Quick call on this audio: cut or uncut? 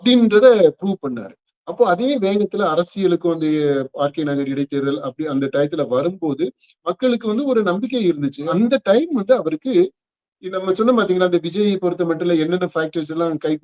cut